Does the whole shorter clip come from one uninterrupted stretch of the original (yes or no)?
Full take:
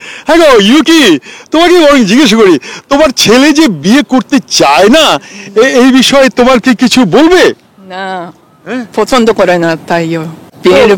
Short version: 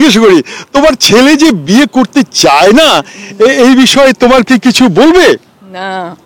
yes